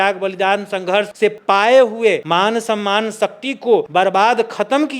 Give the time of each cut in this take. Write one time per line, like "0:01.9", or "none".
0:01.3
0:02.2
0:03.9